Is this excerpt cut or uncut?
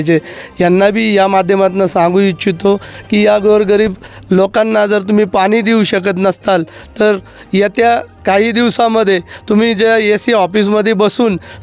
uncut